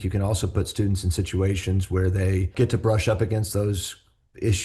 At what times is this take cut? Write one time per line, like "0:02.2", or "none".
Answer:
0:02.5

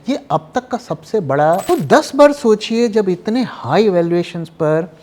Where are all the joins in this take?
0:01.6

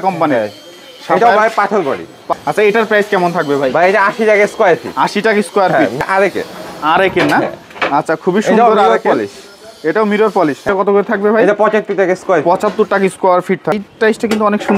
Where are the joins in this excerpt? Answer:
0:02.3
0:06.0
0:10.6
0:13.7

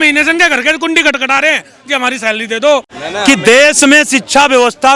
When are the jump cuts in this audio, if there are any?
0:02.9

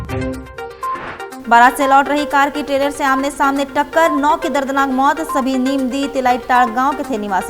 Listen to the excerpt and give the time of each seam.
0:01.3

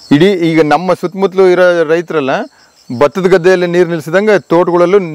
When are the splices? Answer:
none

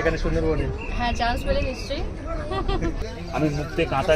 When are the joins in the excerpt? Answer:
0:03.0

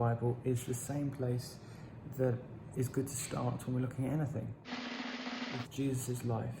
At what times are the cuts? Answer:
0:04.6
0:05.7

